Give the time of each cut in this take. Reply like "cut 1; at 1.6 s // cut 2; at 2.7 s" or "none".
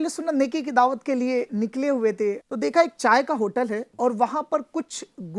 cut 1; at 1.5 s // cut 2; at 2.5 s // cut 3; at 3.9 s